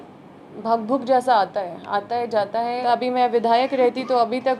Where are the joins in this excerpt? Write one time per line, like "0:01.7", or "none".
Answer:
0:02.8